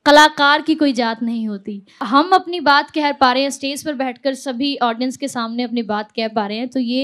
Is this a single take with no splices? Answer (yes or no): no